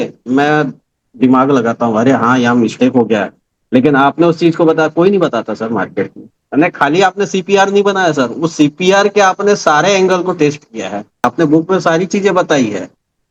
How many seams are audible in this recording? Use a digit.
2